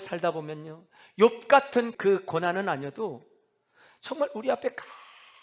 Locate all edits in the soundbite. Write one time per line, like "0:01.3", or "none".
0:01.9

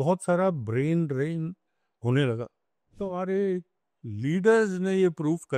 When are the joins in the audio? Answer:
0:03.0

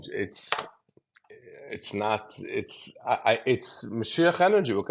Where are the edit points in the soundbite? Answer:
none

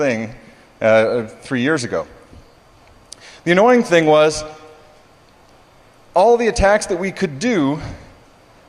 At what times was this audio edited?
none

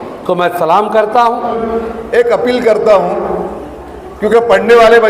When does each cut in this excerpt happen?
0:01.6

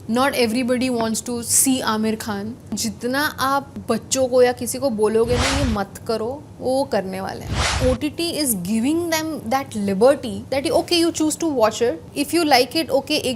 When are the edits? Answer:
0:02.8
0:03.7
0:07.7
0:10.3
0:12.1

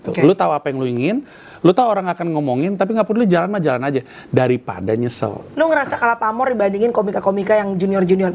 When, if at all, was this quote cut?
0:05.4

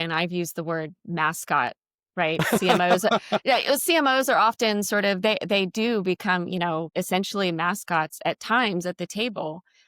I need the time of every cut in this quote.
0:06.9

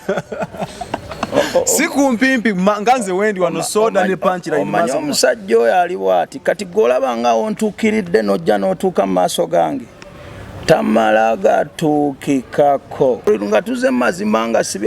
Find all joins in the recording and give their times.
0:13.7

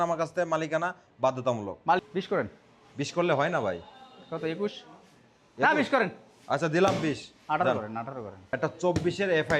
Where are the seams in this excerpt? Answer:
0:02.0
0:08.4

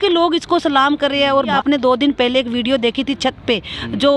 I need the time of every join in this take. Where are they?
0:01.5

